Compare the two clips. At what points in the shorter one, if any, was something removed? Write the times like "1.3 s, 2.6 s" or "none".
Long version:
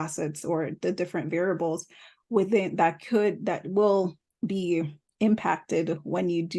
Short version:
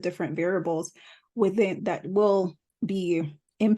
1.8 s